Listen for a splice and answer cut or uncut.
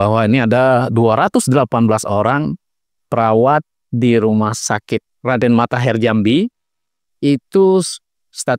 uncut